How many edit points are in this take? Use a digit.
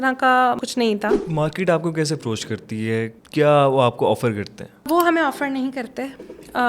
3